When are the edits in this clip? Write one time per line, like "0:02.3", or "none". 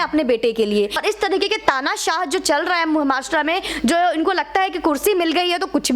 0:01.0